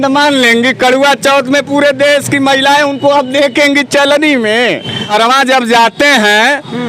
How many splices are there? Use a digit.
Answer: 1